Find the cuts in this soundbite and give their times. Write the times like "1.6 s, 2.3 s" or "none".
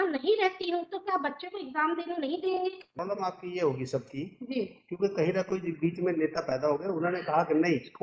2.9 s